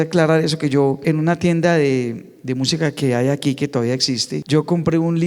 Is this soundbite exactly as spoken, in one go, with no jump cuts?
no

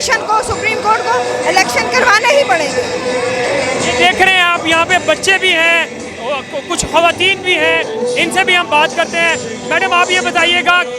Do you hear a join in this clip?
no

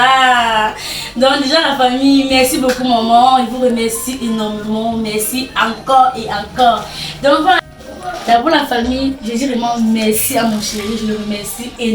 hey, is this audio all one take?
no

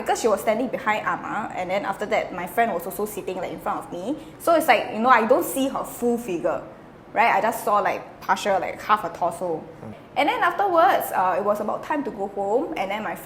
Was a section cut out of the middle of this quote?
yes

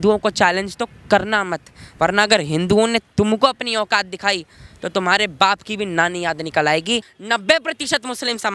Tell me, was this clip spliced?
yes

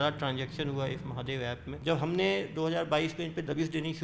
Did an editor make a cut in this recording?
yes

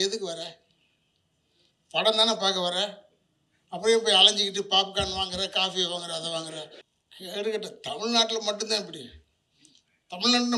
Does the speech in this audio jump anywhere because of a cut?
yes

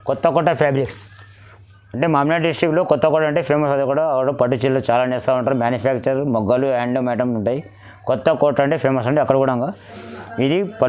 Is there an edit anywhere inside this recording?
no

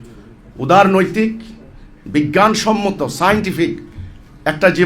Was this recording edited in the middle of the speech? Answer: no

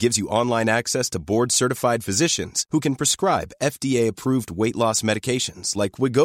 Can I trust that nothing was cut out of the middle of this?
yes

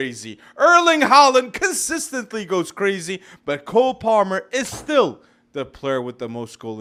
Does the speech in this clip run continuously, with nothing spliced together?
yes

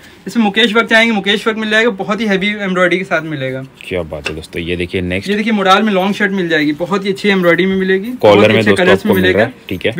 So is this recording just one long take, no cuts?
yes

